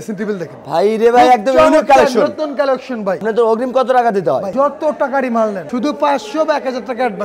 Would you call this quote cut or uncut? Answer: cut